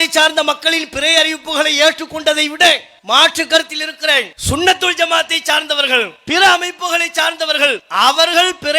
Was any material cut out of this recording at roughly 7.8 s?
yes; 4 cuts; at 2.9 s, 4.3 s, 6.2 s, 7.8 s

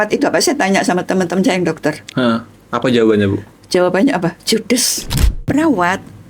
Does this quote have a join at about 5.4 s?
yes; 1 cut; at 5.4 s

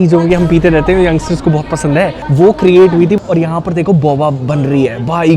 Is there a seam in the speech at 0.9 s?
no; 2 cuts; at 2.2 s, 3.2 s

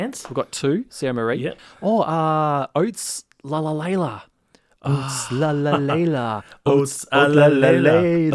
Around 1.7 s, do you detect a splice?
yes; 1 cut; at 1.7 s

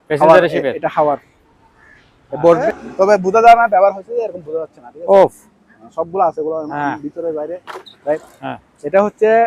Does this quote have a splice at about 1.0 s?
no; 2 cuts; at 2.6 s, 8.3 s

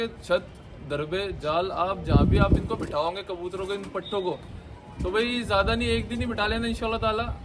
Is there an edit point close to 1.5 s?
no; 0 cuts

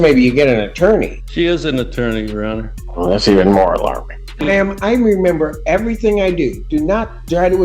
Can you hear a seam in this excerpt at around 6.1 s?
no; 3 cuts; at 1.2 s, 2.8 s, 4.5 s

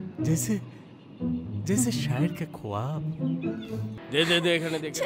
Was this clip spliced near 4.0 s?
yes; 1 cut; at 4.0 s

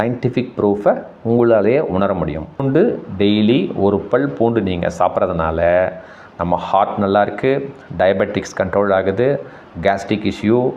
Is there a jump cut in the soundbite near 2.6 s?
yes; 1 cut; at 2.6 s

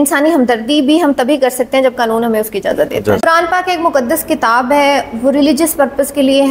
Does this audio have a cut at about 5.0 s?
no; 1 cut; at 3.2 s

